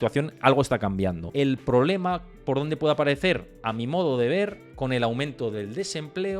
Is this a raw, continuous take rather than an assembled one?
no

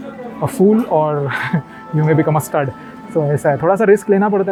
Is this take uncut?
yes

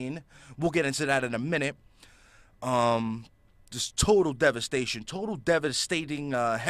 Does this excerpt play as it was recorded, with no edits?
no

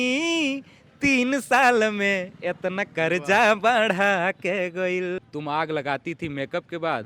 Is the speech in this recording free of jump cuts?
no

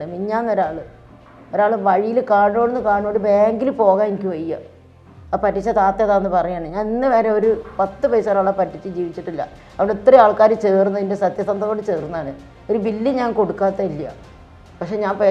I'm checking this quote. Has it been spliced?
no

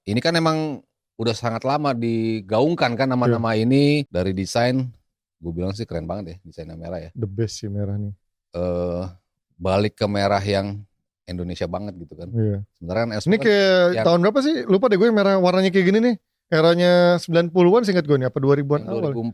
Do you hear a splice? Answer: yes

